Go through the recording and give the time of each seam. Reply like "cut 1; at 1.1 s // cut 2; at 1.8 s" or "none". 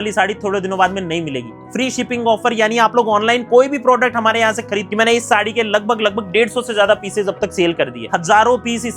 cut 1; at 1.6 s // cut 2; at 4.9 s // cut 3; at 8.0 s